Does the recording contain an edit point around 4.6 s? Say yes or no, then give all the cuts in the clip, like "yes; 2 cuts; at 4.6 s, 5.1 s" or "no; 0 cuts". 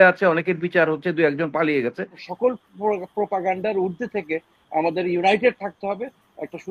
no; 1 cut; at 2.2 s